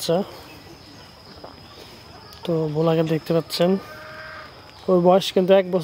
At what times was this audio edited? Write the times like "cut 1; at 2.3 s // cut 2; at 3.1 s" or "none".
none